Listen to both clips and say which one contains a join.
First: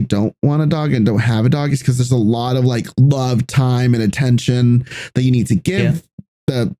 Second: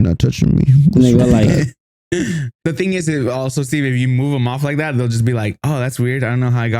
second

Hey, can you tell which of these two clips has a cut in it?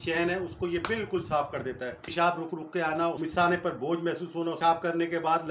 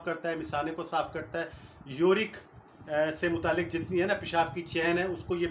first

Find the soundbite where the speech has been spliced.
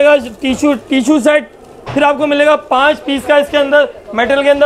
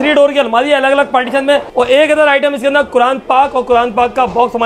second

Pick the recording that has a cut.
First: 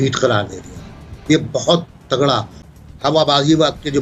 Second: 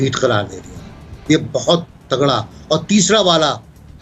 first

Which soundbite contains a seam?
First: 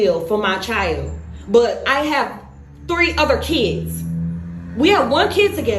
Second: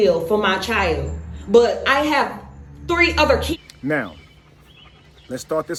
first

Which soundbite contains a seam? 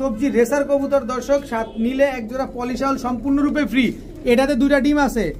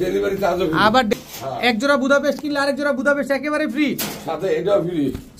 second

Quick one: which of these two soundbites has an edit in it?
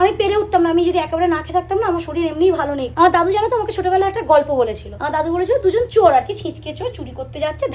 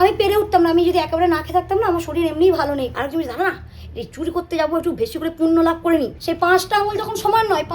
second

